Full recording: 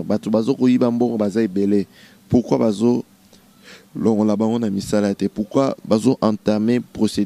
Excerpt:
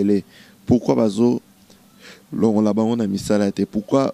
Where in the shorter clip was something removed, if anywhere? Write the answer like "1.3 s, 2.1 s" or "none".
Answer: none

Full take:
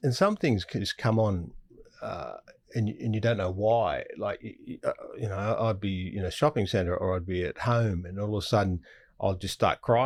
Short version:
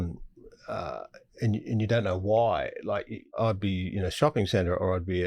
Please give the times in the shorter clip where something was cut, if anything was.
3.4 s

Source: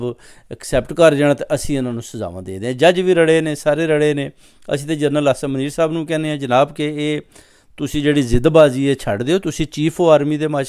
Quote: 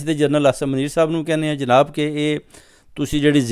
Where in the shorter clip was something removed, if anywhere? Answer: none

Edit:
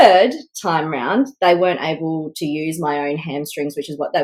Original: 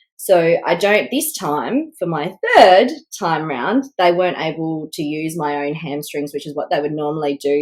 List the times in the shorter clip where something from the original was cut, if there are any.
none

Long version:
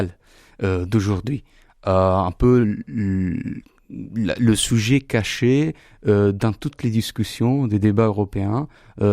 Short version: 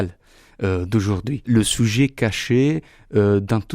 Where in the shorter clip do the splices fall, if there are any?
1.4 s

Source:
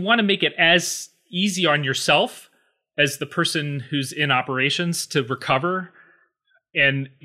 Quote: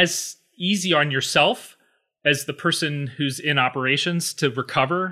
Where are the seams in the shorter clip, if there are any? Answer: none

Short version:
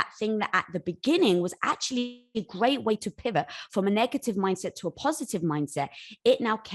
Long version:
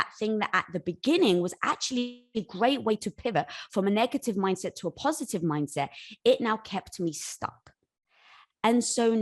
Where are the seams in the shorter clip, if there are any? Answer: none

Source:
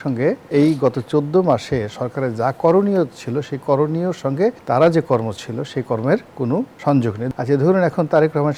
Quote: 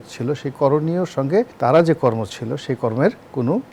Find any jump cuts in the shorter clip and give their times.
none

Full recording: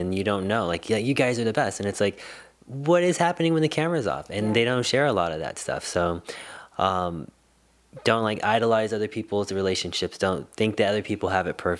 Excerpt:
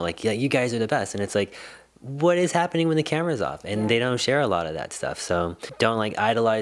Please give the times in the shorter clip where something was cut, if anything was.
5.6 s

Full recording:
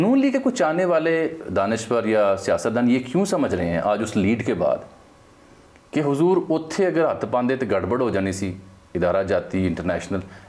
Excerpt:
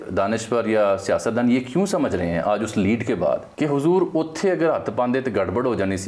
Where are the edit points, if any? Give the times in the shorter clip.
3.5 s

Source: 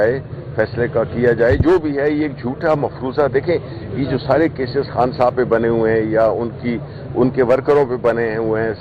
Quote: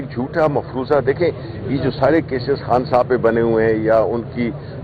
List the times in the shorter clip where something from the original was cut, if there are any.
none

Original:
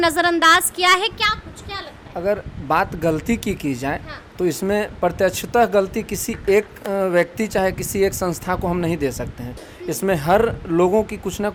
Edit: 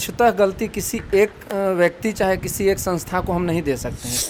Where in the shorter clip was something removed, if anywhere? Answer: none

